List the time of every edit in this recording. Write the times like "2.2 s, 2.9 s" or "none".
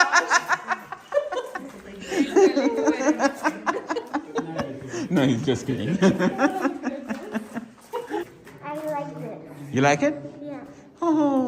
8.2 s